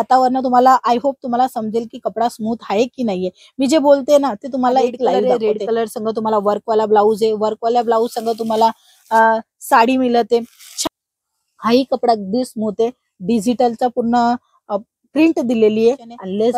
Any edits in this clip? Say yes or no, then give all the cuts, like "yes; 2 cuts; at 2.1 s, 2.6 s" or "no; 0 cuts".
yes; 2 cuts; at 5.2 s, 10.7 s